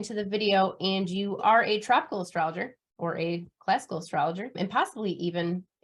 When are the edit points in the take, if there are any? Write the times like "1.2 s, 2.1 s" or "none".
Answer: 1.4 s